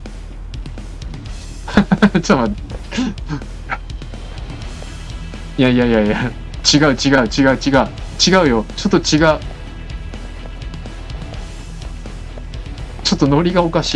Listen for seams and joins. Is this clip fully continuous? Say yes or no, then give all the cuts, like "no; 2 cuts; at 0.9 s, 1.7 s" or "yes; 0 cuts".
yes; 0 cuts